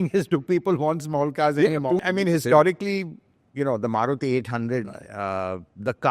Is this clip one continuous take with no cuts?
no; 1 cut; at 2.0 s

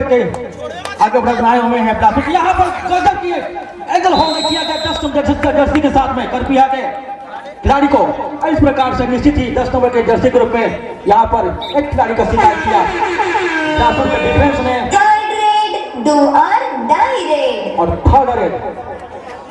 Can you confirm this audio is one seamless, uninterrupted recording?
yes; 0 cuts

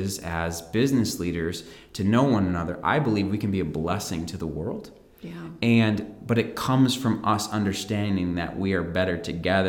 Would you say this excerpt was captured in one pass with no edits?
yes; 0 cuts

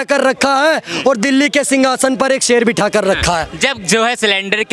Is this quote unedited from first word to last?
yes; 0 cuts

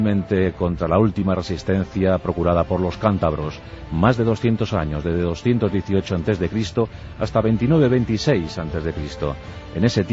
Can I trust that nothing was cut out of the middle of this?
no; 1 cut; at 2.5 s

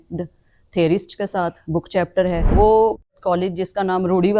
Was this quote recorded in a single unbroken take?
no; 1 cut; at 2.5 s

